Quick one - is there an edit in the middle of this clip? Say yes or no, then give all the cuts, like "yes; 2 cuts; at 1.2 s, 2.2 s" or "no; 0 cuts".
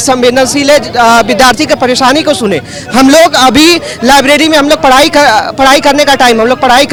no; 0 cuts